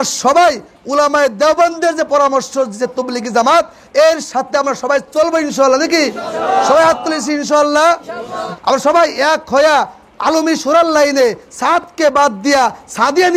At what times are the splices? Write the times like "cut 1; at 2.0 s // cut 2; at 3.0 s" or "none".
cut 1; at 8.4 s

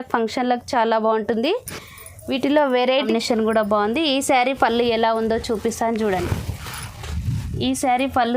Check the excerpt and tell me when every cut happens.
cut 1; at 2.9 s

